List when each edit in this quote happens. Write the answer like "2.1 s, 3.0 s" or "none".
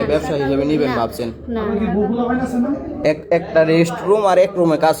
2.9 s